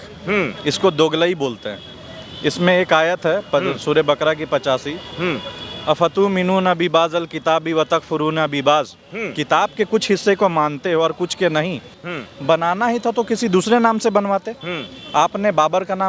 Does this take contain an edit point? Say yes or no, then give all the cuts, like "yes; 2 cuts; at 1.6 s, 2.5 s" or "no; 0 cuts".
yes; 1 cut; at 11.9 s